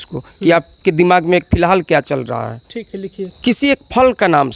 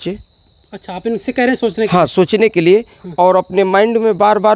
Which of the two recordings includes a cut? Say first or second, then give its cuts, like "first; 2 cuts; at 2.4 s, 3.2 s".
first; 1 cut; at 3.3 s